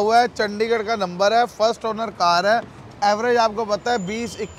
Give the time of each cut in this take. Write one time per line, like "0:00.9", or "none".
none